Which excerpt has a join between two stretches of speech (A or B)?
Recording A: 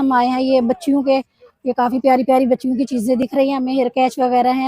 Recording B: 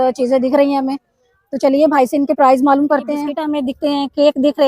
B